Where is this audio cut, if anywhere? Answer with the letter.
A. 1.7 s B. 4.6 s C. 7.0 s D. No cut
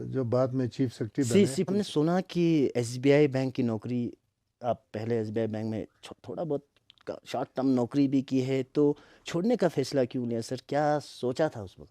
A